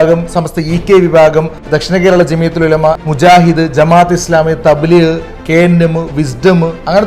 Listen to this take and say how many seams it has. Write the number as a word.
two